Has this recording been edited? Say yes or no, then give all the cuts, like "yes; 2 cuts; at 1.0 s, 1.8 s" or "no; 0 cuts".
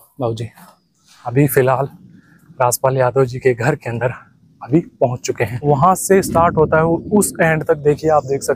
yes; 2 cuts; at 1.3 s, 5.5 s